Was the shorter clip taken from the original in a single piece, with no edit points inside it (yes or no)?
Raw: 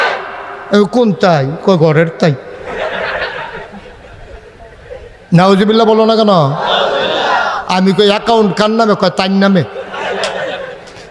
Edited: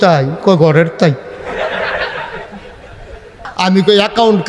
no